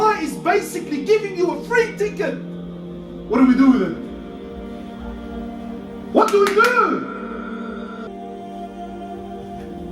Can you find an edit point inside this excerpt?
no; 0 cuts

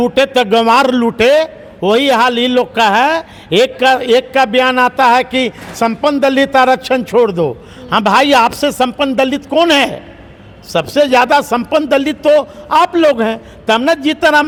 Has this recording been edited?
no; 0 cuts

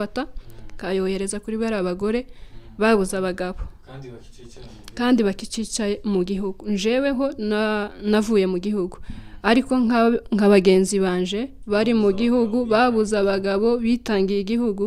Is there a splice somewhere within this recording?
no; 0 cuts

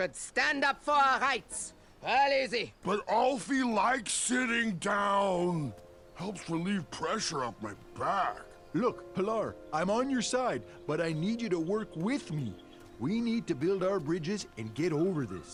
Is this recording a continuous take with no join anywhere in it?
yes; 0 cuts

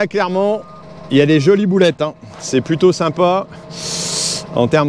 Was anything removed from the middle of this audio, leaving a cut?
no; 0 cuts

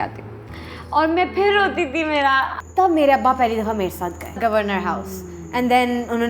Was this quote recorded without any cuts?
no; 2 cuts; at 2.6 s, 4.4 s

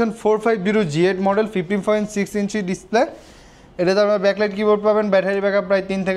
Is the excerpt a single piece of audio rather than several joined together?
yes; 0 cuts

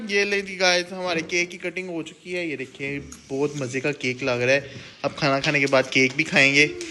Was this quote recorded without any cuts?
yes; 0 cuts

